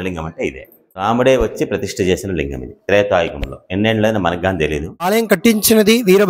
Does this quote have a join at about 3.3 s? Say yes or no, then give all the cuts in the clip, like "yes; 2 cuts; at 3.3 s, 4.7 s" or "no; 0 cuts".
no; 2 cuts; at 1.0 s, 5.1 s